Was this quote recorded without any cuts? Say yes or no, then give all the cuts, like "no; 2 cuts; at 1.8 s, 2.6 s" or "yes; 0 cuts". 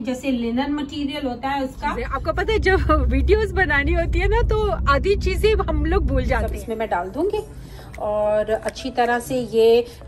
no; 2 cuts; at 2.1 s, 6.5 s